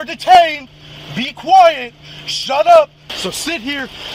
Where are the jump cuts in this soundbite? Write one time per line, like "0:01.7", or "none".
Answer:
0:03.1